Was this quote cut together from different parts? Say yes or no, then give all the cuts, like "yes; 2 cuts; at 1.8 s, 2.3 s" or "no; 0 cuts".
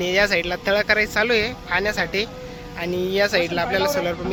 no; 0 cuts